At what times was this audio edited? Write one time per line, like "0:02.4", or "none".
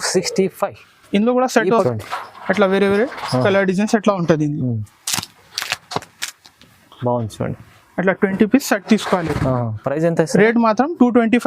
0:01.8